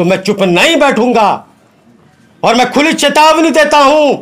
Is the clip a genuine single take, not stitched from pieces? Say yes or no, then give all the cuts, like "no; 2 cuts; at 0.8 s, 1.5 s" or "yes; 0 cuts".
yes; 0 cuts